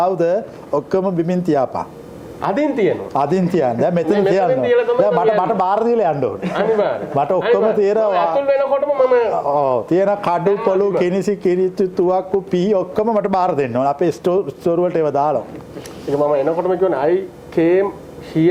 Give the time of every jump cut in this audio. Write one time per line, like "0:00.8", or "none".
none